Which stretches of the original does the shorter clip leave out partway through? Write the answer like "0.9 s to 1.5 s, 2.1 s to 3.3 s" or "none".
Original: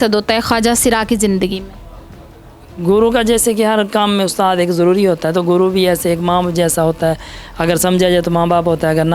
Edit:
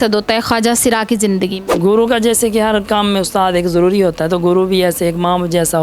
1.6 s to 2.7 s